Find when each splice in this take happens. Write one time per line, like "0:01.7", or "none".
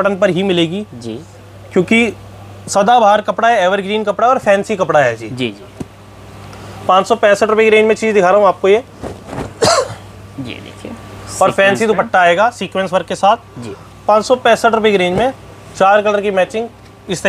none